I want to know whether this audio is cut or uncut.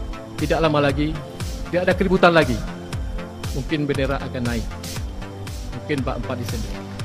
uncut